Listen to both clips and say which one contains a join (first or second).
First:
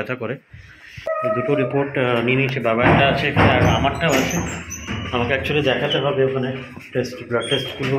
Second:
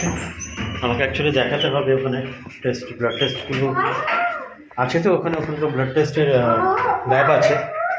first